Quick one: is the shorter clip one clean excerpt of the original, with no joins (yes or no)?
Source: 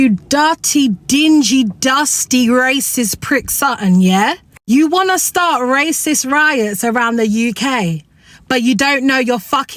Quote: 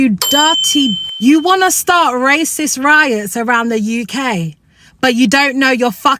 no